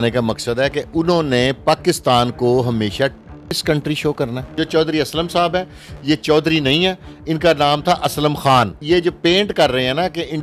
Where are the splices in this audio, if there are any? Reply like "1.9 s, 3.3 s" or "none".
4.5 s, 8.8 s